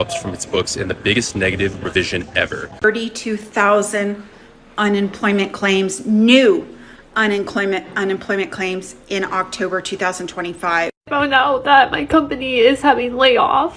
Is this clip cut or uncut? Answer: cut